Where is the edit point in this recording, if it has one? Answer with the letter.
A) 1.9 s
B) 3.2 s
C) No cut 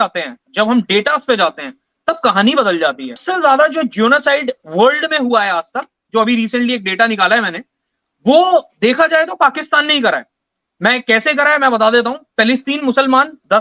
B